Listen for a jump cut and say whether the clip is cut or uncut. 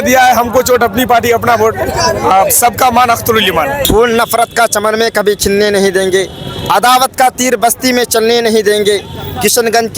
cut